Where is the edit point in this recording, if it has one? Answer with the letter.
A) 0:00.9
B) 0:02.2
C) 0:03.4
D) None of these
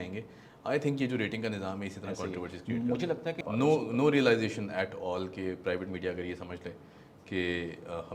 C